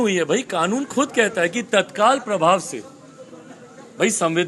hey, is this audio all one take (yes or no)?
yes